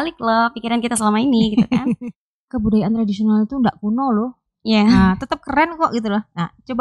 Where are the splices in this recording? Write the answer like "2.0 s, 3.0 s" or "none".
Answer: 1.9 s